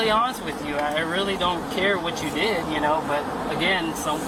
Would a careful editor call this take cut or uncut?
uncut